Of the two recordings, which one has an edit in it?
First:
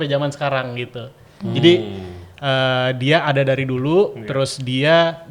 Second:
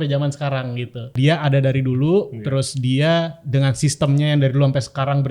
second; 1 cut; at 1.1 s

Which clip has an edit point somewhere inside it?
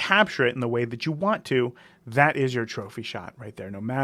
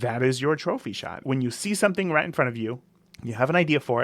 second; 1 cut; at 1.2 s

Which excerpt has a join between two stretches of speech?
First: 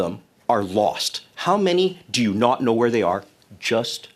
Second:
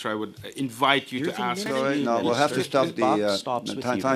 second; 1 cut; at 1.7 s

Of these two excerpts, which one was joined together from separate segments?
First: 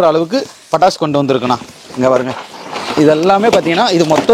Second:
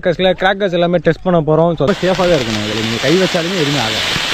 second; 1 cut; at 1.9 s

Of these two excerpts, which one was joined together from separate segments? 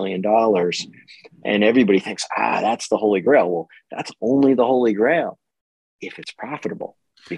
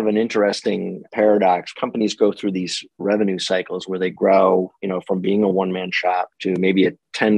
second; 3 cuts; at 1.0 s, 1.7 s, 6.3 s

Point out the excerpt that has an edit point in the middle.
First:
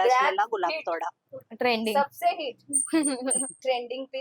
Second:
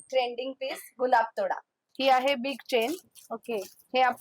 second; 1 cut; at 1.8 s

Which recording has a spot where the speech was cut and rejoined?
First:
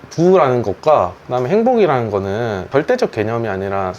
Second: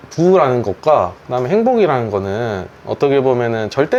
first; 1 cut; at 2.7 s

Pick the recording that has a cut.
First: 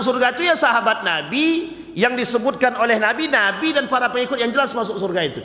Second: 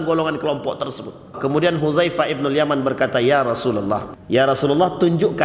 second; 2 cuts; at 1.3 s, 4.1 s

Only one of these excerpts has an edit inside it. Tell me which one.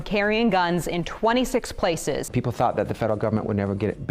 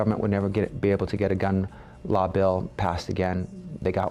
first; 1 cut; at 2.2 s

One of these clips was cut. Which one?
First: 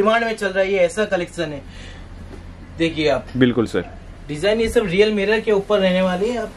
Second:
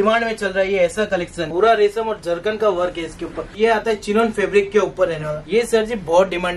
second; 3 cuts; at 1.4 s, 3.5 s, 5.3 s

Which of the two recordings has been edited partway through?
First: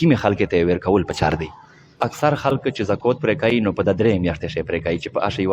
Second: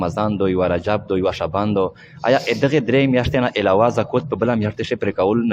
first; 1 cut; at 2.0 s

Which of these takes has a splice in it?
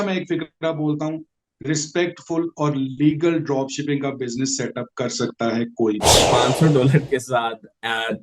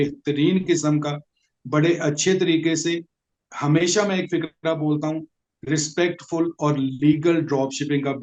first; 1 cut; at 6.2 s

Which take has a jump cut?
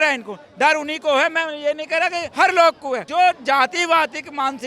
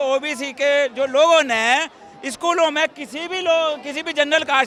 first; 2 cuts; at 2.2 s, 3.0 s

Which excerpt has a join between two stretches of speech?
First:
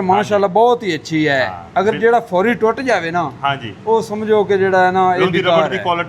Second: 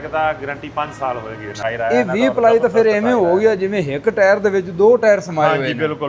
second; 1 cut; at 1.6 s

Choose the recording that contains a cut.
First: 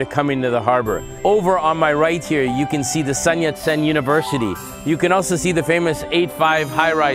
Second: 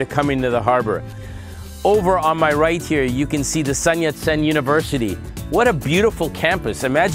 first; 2 cuts; at 1.1 s, 4.7 s

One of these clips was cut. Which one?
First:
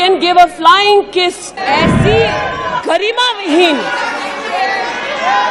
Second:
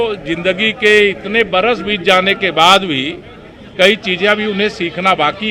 first; 1 cut; at 1.5 s

